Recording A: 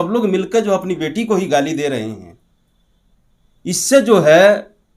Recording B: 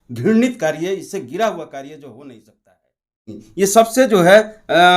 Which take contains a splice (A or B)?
B